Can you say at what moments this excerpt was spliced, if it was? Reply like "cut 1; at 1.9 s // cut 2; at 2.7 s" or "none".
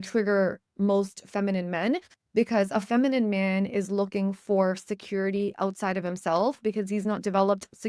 none